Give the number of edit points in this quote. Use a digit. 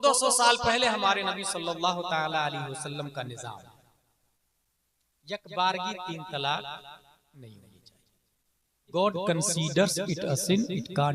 1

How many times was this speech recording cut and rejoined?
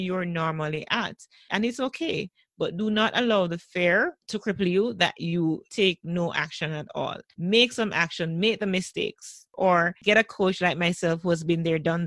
1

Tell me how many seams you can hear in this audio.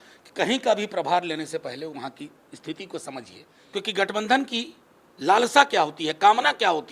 1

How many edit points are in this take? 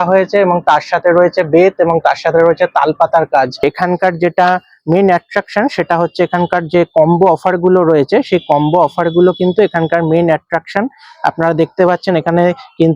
1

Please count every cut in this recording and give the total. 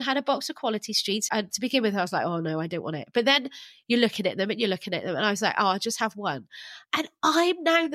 1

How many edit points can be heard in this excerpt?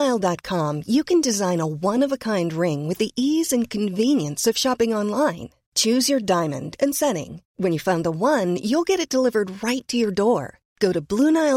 0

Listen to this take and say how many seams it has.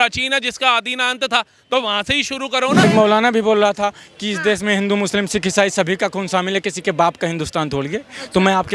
1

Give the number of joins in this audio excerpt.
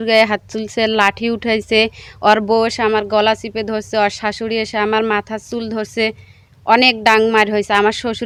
0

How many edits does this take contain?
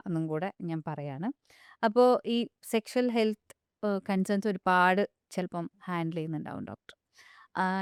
0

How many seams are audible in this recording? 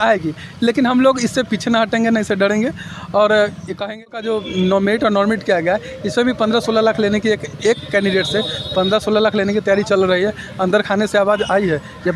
1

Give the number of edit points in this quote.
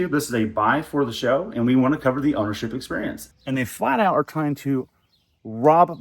1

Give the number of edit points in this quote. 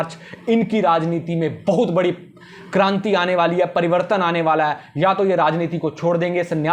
0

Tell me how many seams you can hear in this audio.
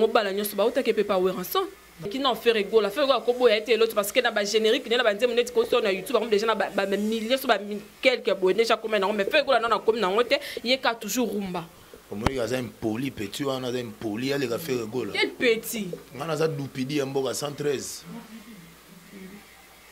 1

